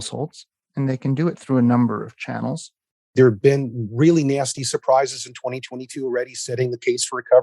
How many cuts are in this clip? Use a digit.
1